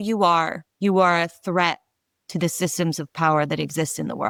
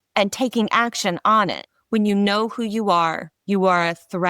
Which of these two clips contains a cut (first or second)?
second